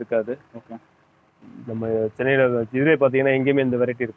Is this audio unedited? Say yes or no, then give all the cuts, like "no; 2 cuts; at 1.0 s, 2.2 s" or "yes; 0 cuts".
yes; 0 cuts